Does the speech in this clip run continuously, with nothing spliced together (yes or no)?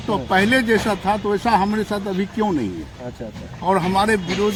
yes